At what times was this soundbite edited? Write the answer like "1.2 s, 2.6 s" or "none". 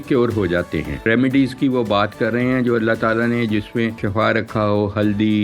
1.0 s, 4.0 s